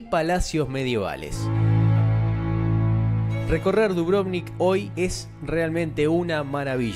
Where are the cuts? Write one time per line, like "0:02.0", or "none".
0:01.5